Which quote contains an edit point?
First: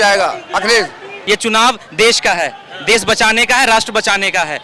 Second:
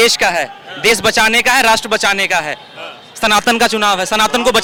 first; 1 cut; at 1.1 s

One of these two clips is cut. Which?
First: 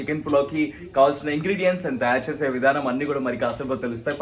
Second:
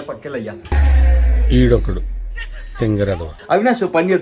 second; 1 cut; at 3.3 s

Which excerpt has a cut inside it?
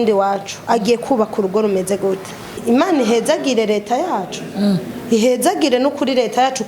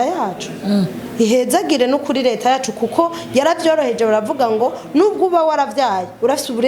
first; 1 cut; at 2.6 s

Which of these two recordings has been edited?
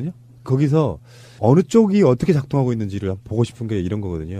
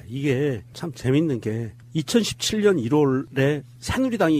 first; 1 cut; at 3.2 s

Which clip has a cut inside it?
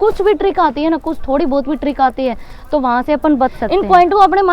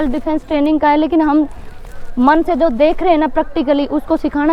first; 1 cut; at 3.6 s

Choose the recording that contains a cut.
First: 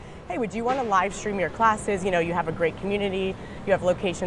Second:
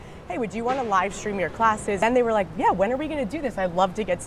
second; 1 cut; at 2.0 s

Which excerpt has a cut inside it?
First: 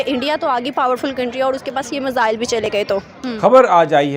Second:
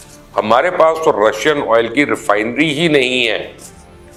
first; 1 cut; at 3.2 s

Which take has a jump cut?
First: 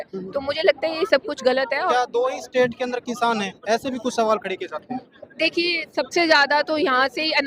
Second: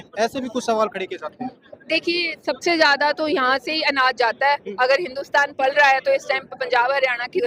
first; 1 cut; at 1.9 s

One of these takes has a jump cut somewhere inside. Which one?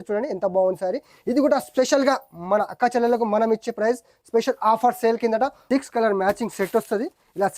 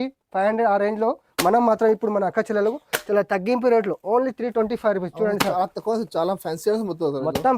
first; 1 cut; at 5.6 s

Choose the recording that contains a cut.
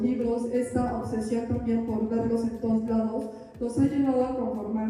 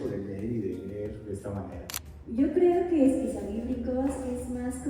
second; 1 cut; at 1.8 s

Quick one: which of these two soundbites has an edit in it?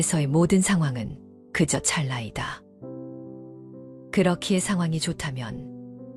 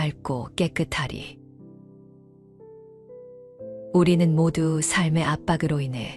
second; 2 cuts; at 1.6 s, 3.3 s

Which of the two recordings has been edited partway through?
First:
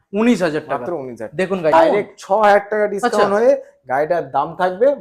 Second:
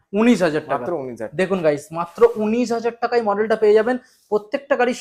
first; 1 cut; at 1.7 s

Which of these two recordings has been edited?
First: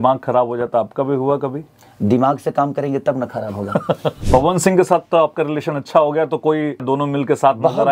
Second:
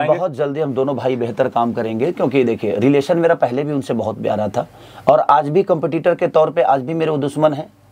first; 2 cuts; at 4.2 s, 6.8 s

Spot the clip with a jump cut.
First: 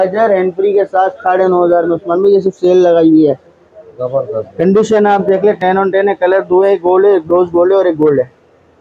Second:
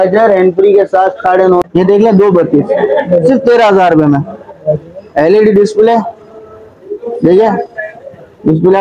second; 1 cut; at 1.6 s

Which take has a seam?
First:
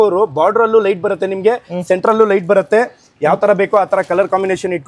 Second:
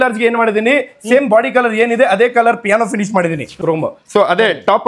second; 1 cut; at 3.5 s

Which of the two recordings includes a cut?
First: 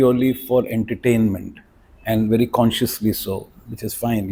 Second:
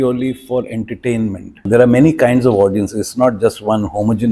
second; 1 cut; at 1.7 s

